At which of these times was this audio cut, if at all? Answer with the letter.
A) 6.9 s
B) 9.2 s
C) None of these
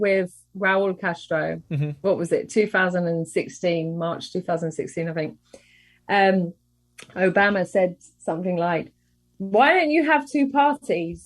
B